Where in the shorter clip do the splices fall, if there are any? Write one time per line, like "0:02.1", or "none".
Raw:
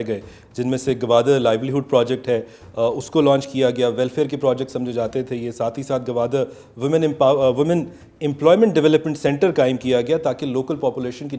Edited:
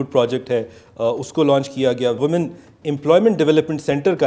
0:02.2